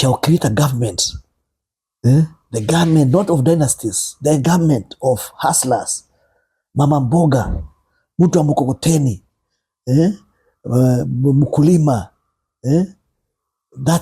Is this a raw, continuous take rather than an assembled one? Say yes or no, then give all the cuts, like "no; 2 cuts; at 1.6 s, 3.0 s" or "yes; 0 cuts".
yes; 0 cuts